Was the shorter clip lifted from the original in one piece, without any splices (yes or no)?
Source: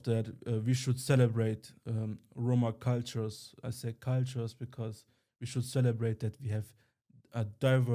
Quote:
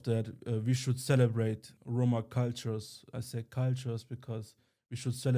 no